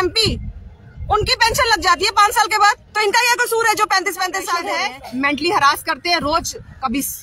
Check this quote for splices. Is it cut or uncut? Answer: cut